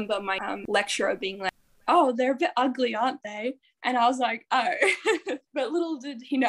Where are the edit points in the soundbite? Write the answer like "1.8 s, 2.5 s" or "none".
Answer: none